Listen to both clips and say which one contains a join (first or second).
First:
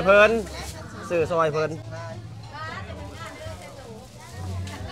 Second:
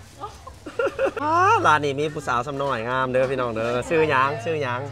second